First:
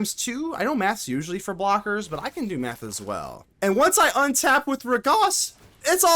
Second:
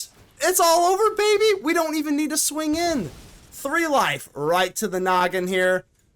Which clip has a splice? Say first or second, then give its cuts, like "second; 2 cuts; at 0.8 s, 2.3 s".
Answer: first; 1 cut; at 3.4 s